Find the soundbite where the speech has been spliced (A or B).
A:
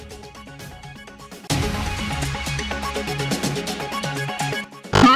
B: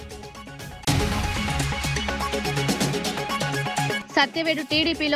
B